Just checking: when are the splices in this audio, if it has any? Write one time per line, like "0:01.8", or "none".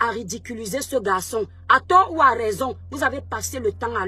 none